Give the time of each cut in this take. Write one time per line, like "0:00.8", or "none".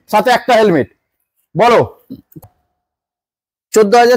0:02.4